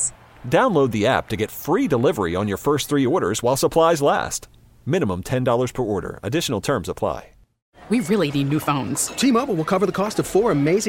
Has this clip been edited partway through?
yes; 1 cut; at 7.7 s

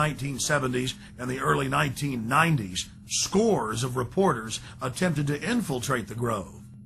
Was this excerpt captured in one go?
no; 1 cut; at 2.9 s

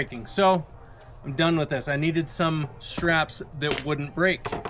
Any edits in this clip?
no; 0 cuts

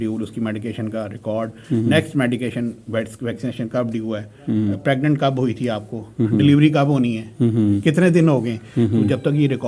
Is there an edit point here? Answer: no; 0 cuts

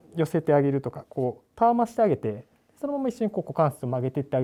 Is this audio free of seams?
yes; 0 cuts

